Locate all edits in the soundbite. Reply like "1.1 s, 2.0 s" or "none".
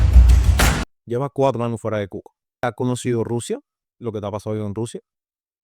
0.9 s, 2.6 s